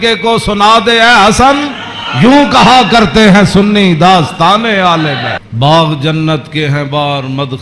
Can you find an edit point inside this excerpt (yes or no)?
yes